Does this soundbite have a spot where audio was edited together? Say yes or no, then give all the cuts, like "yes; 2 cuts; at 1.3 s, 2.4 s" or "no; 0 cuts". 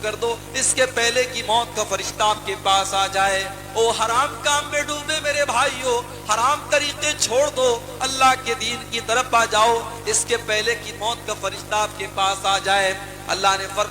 no; 0 cuts